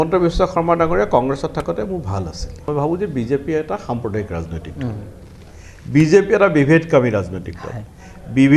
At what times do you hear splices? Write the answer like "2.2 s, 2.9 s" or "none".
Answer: 2.6 s